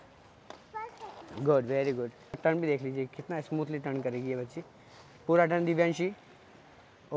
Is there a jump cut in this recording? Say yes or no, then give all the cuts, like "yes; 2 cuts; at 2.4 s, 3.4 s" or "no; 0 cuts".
yes; 1 cut; at 2.4 s